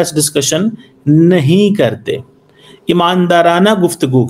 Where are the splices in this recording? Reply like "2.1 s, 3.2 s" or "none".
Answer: none